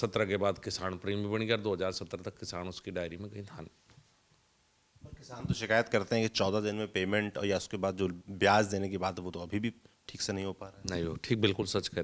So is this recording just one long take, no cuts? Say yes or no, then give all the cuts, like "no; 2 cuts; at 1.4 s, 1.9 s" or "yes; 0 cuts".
yes; 0 cuts